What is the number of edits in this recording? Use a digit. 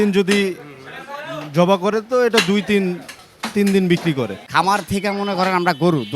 1